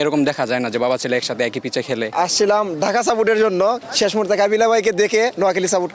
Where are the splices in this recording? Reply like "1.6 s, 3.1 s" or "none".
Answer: 2.1 s, 3.9 s